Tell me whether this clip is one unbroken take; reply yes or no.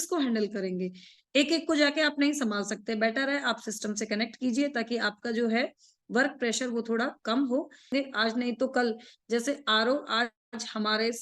no